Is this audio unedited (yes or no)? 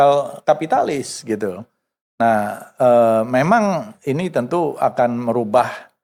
yes